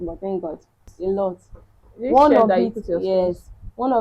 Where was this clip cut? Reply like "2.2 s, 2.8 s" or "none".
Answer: 0.9 s